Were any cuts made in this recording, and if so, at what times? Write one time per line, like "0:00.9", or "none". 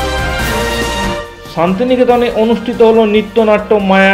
0:01.4